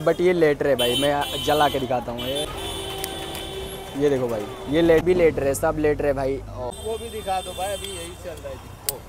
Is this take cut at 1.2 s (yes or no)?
no